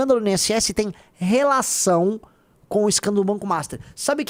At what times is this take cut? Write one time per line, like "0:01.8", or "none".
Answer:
none